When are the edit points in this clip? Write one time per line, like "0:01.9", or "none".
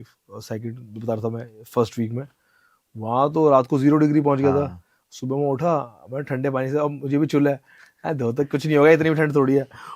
none

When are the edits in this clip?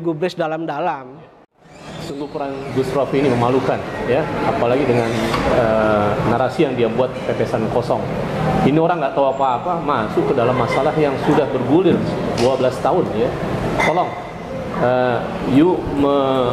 0:01.9

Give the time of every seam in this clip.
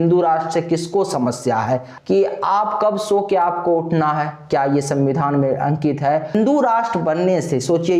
0:01.9
0:06.3

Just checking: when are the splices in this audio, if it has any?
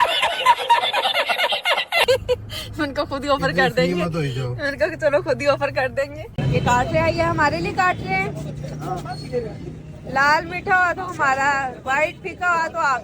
0:06.3

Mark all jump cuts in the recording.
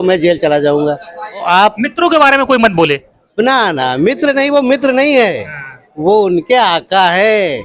0:01.5

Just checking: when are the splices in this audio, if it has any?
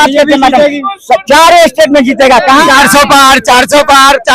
0:02.7

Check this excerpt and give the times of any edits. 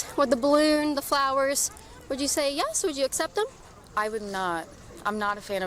none

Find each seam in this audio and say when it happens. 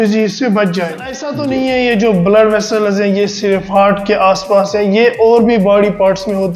0:01.3

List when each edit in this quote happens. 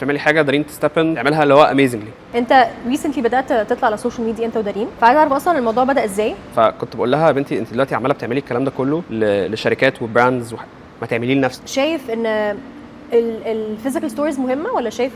0:01.2
0:02.3
0:04.9
0:06.5
0:09.1
0:11.6

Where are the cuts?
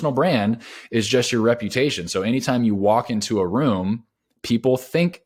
none

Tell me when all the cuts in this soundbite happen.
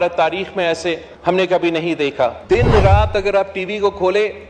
0:02.4

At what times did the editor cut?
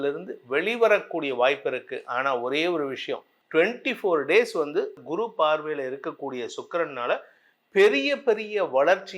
0:03.3
0:05.0

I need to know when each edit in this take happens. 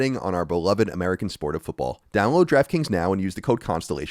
0:02.0

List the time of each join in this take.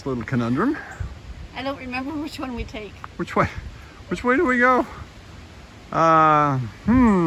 none

